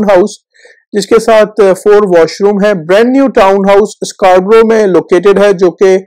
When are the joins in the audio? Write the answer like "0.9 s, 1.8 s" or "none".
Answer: none